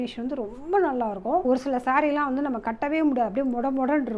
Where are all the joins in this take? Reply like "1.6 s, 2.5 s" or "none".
1.4 s